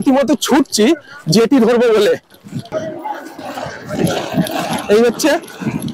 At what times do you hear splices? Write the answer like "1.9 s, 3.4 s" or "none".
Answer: none